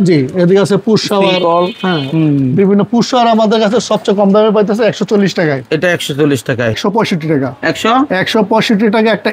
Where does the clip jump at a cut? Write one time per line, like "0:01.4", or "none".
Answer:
0:06.8